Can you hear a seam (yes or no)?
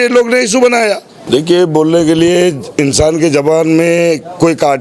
yes